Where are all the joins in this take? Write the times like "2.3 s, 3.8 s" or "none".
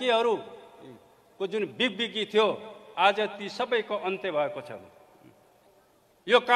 none